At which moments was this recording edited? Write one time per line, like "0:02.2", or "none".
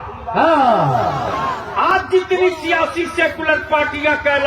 0:01.6